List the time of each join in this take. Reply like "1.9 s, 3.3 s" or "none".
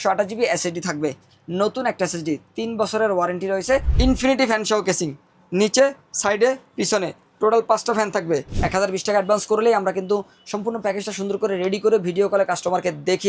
3.9 s, 8.5 s